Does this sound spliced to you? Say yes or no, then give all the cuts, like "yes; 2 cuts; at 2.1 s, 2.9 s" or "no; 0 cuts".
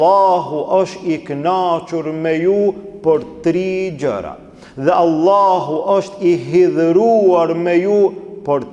no; 0 cuts